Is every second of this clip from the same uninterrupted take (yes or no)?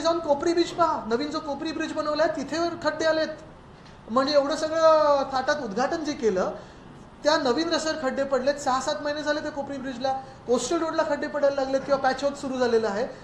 yes